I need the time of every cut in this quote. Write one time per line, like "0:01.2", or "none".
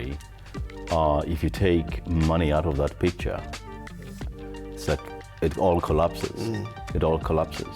none